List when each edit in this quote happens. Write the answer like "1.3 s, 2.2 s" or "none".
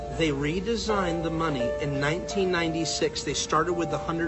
none